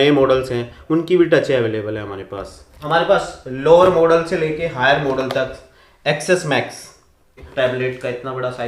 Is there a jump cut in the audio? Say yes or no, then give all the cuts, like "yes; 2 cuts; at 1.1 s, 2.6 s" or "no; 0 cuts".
yes; 2 cuts; at 2.7 s, 7.4 s